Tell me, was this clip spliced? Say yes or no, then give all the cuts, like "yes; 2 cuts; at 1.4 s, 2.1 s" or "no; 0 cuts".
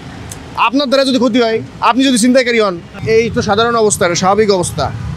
yes; 1 cut; at 3.0 s